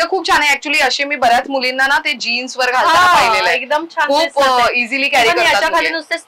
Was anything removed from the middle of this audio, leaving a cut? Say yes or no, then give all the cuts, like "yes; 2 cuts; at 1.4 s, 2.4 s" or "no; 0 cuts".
no; 0 cuts